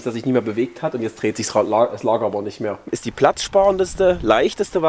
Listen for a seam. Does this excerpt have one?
yes; 1 cut; at 3.0 s

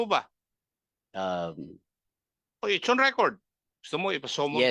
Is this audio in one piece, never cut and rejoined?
yes; 0 cuts

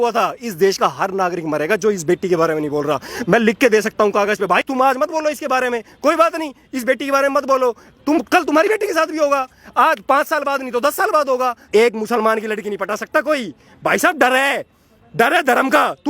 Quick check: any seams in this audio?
yes; 1 cut; at 11.7 s

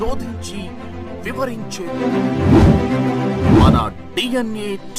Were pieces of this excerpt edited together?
no; 0 cuts

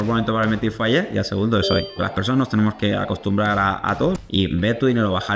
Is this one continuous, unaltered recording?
no; 2 cuts; at 2.0 s, 4.2 s

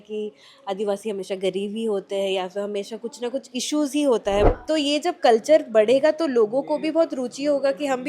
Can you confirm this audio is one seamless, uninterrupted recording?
no; 1 cut; at 4.5 s

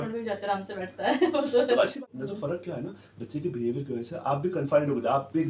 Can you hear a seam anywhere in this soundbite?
no; 0 cuts

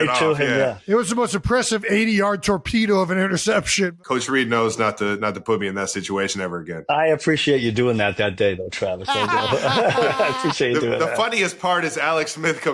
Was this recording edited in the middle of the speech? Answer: yes; 2 cuts; at 3.9 s, 6.7 s

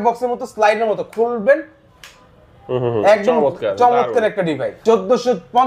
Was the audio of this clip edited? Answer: yes; 1 cut; at 4.7 s

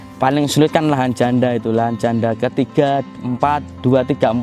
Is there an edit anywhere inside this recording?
no; 0 cuts

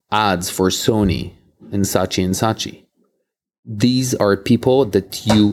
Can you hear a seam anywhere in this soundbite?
no; 0 cuts

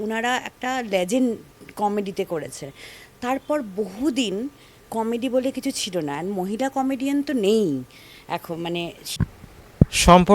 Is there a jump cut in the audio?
yes; 1 cut; at 9.2 s

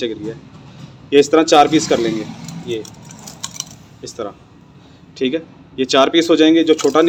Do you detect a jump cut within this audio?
no; 0 cuts

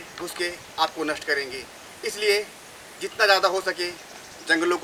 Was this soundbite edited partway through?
no; 0 cuts

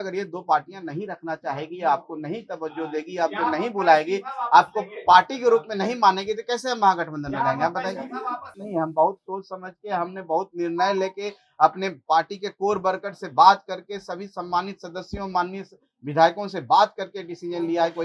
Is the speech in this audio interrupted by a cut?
yes; 1 cut; at 8.6 s

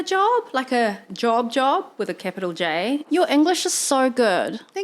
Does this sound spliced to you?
yes; 1 cut; at 3.1 s

